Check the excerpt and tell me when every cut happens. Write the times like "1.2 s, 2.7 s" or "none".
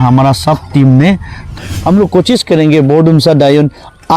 1.6 s